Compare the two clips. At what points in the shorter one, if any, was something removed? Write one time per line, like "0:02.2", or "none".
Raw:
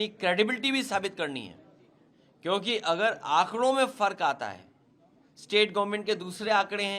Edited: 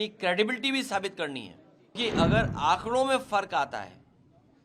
0:02.0